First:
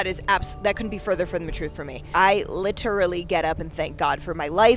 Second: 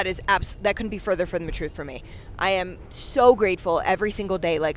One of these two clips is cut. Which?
first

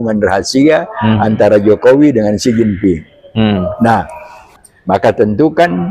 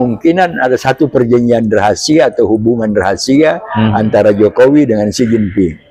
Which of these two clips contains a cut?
first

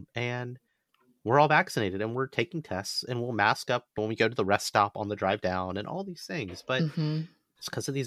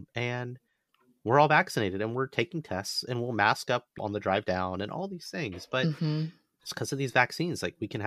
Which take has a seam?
second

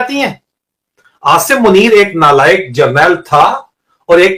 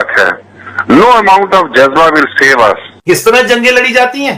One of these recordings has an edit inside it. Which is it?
second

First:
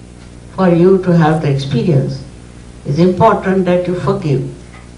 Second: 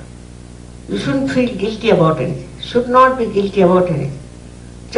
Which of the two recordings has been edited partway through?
first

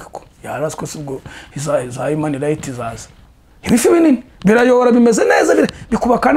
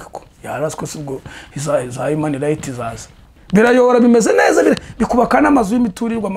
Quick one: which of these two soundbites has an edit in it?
second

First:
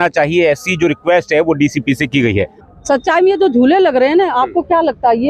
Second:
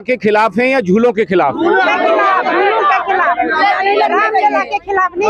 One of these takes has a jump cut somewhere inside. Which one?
first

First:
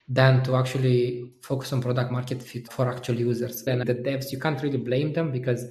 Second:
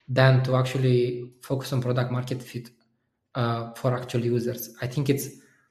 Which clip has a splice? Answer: first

